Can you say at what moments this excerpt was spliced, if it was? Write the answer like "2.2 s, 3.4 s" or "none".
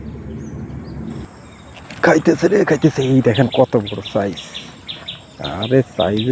1.3 s